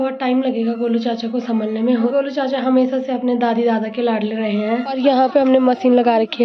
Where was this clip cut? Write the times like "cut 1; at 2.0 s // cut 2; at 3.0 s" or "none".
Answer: cut 1; at 2.1 s // cut 2; at 5.0 s